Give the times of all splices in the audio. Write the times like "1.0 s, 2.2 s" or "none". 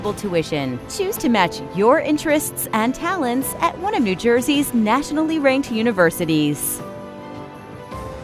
6.6 s